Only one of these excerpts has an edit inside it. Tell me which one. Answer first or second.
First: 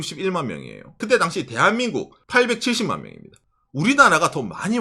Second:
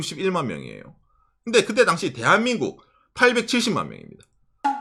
first